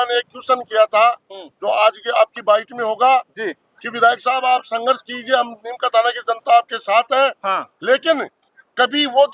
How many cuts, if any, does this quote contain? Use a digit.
0